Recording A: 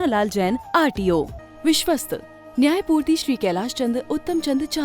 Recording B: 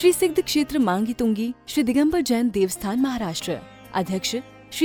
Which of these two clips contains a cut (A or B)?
A